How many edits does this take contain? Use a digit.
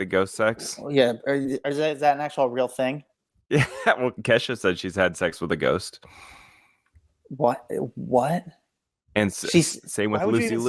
1